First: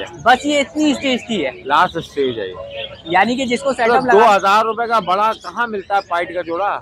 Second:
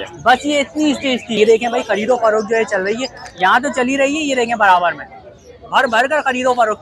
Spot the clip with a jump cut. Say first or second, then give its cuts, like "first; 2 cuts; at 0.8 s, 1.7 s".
second; 1 cut; at 1.4 s